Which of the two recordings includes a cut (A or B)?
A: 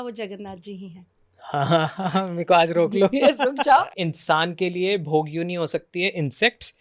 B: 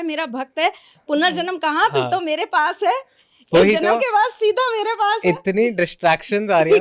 A